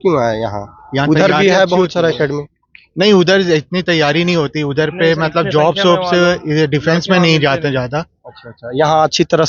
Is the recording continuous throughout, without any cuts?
yes; 0 cuts

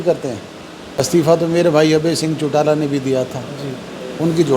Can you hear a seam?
yes; 1 cut; at 1.0 s

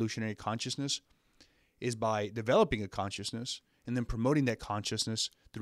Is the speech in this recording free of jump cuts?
yes; 0 cuts

